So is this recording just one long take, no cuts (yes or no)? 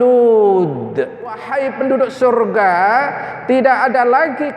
no